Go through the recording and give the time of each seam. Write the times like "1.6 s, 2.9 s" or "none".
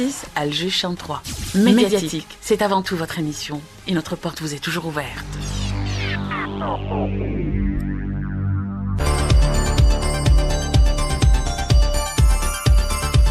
5.2 s